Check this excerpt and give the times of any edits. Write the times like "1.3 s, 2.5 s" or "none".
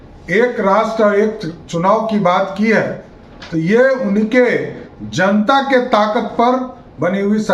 none